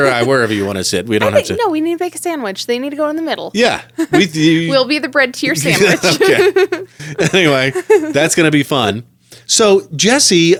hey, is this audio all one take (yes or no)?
yes